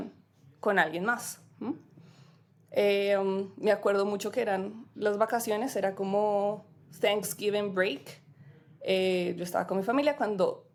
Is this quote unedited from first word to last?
yes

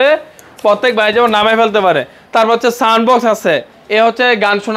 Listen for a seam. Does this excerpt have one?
no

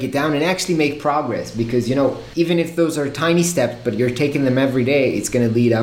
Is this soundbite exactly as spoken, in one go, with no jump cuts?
yes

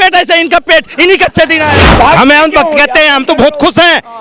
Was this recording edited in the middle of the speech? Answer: yes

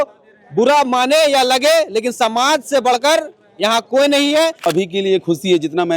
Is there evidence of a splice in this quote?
yes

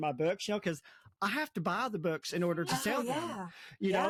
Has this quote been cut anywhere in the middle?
no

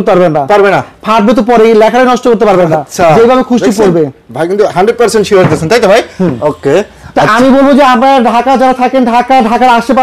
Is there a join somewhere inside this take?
no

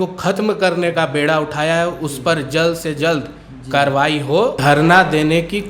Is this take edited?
yes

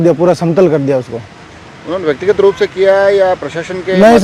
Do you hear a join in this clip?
no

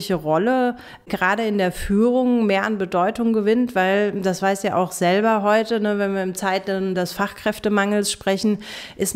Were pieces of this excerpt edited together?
yes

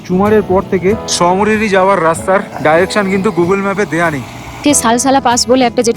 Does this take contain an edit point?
yes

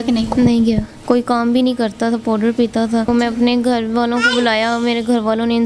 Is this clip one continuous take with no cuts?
no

